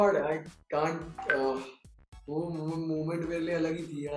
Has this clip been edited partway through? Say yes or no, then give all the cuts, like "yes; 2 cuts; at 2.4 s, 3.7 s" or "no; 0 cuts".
no; 0 cuts